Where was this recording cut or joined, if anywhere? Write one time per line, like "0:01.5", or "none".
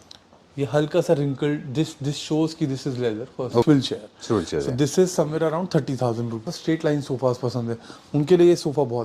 0:03.6
0:06.5